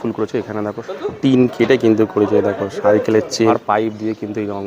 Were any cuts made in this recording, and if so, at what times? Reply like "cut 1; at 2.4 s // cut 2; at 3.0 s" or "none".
cut 1; at 0.9 s // cut 2; at 3.5 s